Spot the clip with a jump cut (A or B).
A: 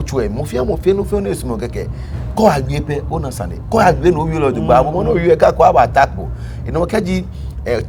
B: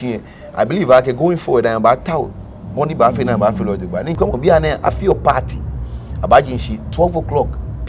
B